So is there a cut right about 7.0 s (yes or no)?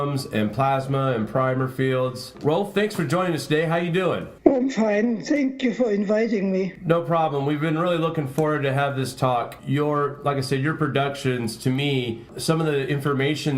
no